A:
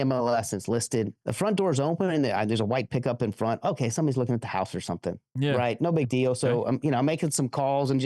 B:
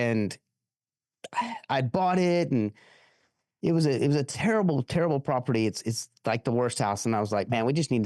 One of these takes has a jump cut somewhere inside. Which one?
A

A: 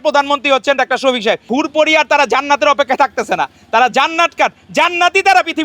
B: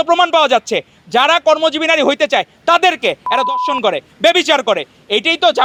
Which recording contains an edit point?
A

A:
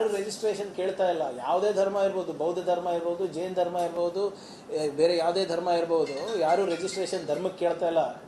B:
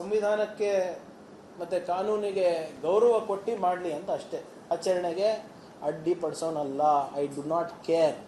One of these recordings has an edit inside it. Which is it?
B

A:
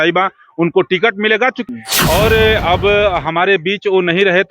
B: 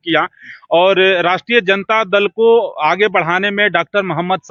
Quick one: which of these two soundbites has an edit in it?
A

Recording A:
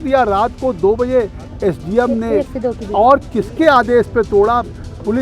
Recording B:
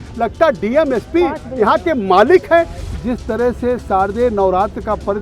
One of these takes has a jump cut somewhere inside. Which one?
B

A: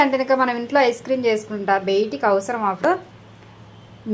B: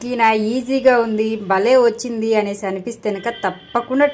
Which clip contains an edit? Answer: A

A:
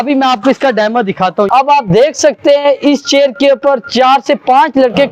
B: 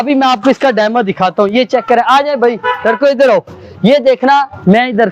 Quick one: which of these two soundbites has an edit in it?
A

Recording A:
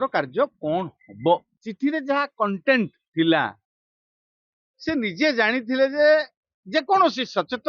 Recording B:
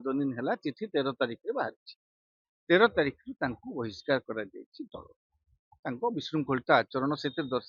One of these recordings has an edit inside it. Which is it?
A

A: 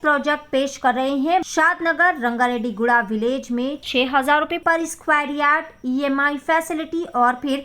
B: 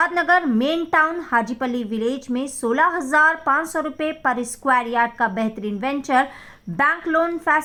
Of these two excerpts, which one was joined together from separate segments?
A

